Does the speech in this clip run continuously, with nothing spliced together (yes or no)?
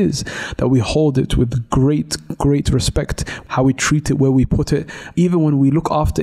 no